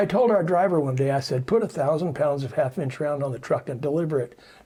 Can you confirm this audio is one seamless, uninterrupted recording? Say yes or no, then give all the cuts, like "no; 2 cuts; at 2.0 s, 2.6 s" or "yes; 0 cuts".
yes; 0 cuts